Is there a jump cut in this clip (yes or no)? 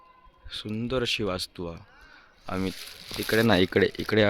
yes